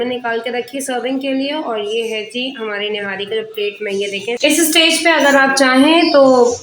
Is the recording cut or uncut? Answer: cut